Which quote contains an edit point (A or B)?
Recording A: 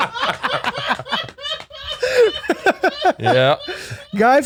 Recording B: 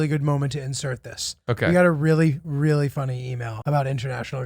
B